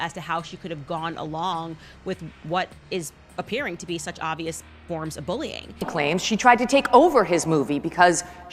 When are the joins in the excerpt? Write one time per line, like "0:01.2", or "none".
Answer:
0:05.7